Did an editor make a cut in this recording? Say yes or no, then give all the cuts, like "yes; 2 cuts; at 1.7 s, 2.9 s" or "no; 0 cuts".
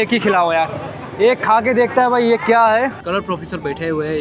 yes; 1 cut; at 3.0 s